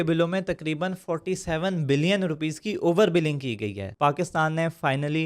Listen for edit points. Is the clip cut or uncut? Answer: cut